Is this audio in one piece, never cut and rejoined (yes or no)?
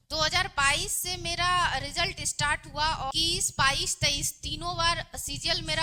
no